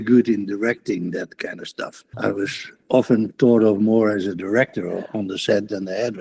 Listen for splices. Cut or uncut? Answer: cut